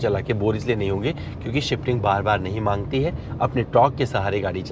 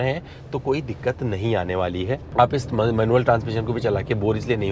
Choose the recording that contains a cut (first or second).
second